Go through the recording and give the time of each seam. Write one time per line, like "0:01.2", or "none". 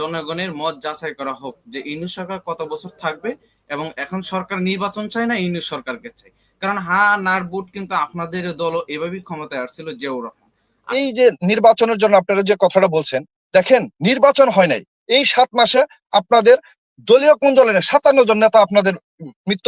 0:10.9